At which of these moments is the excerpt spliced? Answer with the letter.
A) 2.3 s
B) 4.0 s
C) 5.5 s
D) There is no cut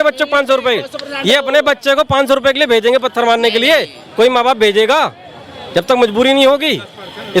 D